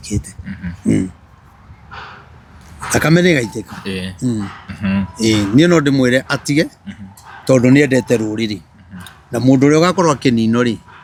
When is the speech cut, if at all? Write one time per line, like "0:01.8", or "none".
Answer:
none